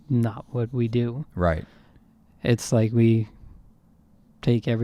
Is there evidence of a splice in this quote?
no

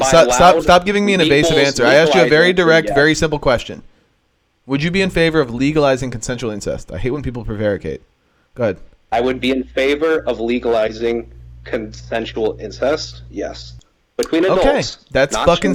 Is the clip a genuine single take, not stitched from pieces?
yes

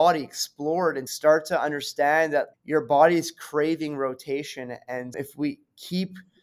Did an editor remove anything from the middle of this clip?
yes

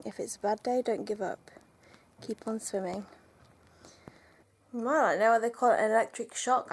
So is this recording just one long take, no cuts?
no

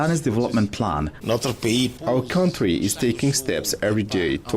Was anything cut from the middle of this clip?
yes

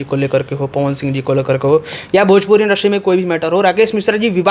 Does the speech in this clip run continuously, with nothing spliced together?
yes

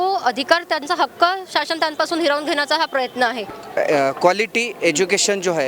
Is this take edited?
yes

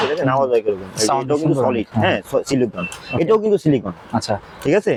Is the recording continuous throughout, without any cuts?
yes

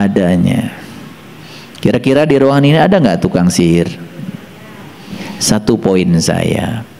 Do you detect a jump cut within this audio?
yes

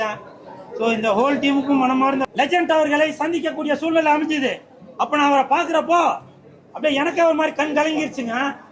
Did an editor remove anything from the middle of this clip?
yes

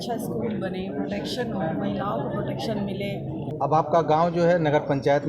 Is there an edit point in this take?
yes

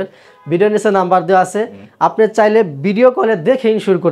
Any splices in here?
no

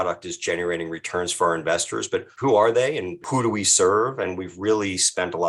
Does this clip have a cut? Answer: yes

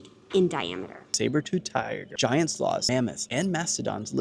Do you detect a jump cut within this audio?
yes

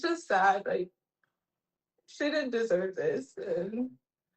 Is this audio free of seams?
yes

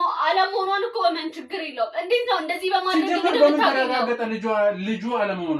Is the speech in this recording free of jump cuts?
yes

